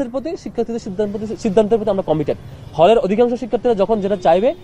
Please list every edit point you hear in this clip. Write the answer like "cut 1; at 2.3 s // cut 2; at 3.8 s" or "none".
none

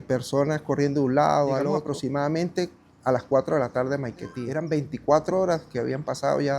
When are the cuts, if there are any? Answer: cut 1; at 1.8 s // cut 2; at 4.5 s

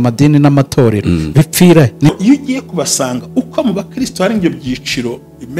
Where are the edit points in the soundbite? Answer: cut 1; at 2.1 s

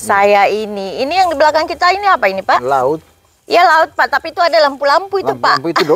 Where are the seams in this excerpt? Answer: none

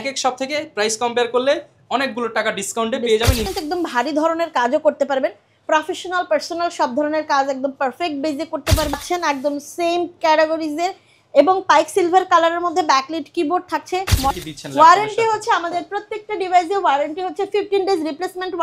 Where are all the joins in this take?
cut 1; at 3.4 s // cut 2; at 9.0 s // cut 3; at 14.3 s

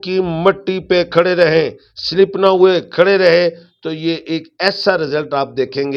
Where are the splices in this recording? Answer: none

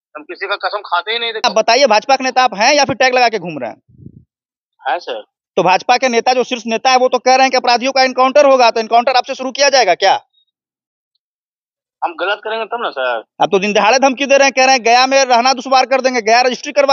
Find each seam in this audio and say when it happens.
cut 1; at 1.4 s

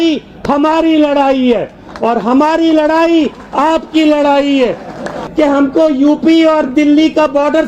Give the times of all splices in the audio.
cut 1; at 5.2 s

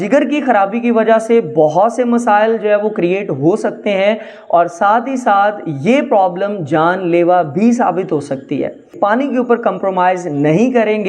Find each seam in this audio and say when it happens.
cut 1; at 8.9 s

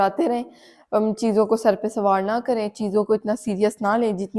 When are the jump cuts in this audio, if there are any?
none

